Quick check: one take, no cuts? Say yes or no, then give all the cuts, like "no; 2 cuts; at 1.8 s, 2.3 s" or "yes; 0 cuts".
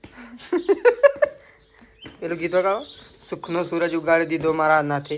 yes; 0 cuts